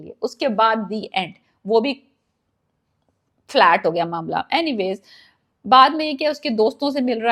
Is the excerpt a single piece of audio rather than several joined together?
yes; 0 cuts

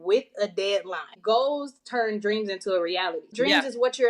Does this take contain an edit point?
yes; 2 cuts; at 1.1 s, 3.3 s

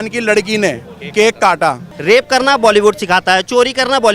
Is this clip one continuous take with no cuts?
no; 1 cut; at 1.9 s

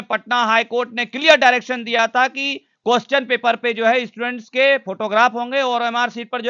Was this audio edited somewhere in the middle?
no; 0 cuts

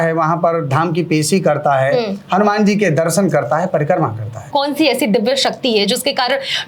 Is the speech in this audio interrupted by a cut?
yes; 1 cut; at 4.5 s

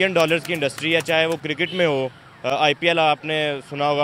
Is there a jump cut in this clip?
no; 0 cuts

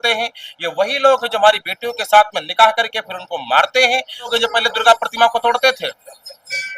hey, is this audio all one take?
no; 1 cut; at 4.3 s

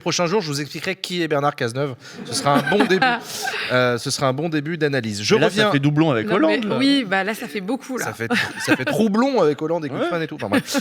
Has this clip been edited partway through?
no; 0 cuts

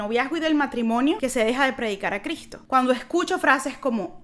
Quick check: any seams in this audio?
yes; 2 cuts; at 1.2 s, 2.5 s

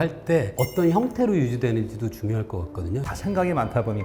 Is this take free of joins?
no; 1 cut; at 3.0 s

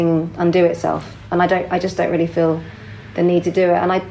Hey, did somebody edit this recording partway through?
no; 0 cuts

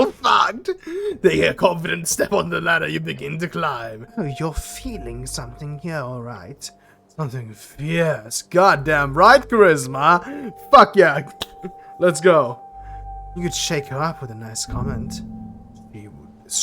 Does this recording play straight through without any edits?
no; 1 cut; at 4.0 s

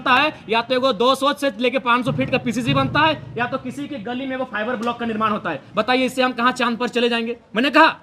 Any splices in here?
no; 0 cuts

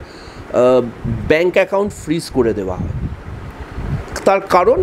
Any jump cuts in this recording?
no; 0 cuts

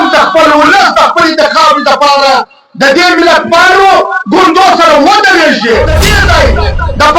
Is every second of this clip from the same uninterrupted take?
no; 1 cut; at 6.1 s

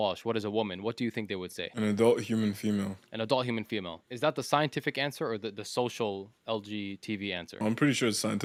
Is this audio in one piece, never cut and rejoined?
yes; 0 cuts

